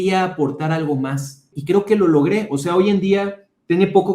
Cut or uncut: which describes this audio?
cut